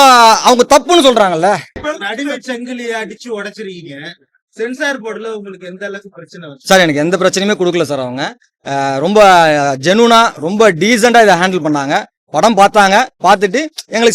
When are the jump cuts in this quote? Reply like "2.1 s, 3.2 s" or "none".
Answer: 1.8 s